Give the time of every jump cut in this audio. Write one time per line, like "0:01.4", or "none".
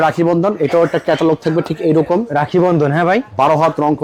none

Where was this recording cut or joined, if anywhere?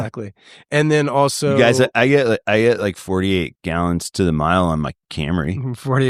none

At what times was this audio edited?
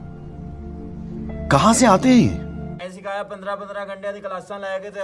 0:02.8

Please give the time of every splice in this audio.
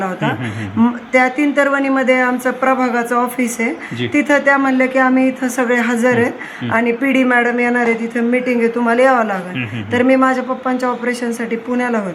none

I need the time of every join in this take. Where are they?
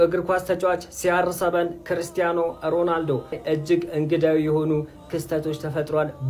0:03.4

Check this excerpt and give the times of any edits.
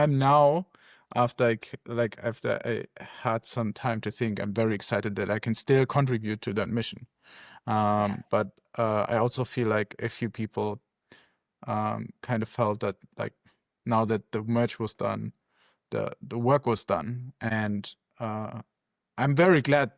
0:17.5

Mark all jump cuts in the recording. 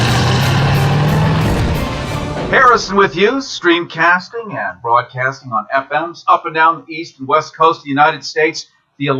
0:02.1

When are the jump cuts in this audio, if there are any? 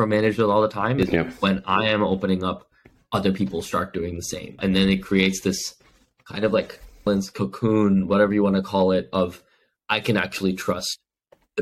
0:01.0
0:07.1

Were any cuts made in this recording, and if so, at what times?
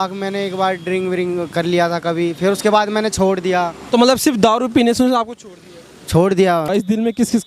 0:03.8
0:06.7

